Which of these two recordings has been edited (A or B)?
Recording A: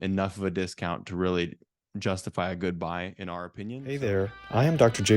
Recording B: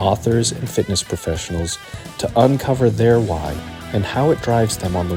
A